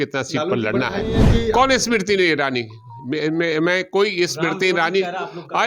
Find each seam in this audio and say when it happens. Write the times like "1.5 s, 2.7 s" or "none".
1.2 s